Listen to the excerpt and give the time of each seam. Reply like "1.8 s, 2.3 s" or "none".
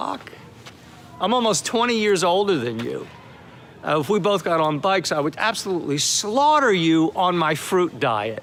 none